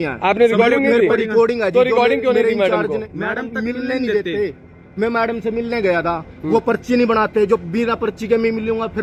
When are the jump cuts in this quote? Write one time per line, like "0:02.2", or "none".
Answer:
none